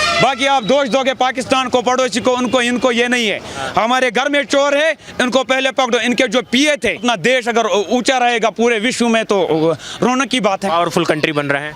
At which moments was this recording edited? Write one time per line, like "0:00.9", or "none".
0:07.0